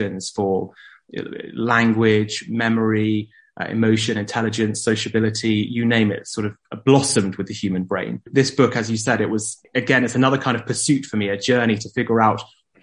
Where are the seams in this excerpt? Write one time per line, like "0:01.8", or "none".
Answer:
0:08.3
0:09.6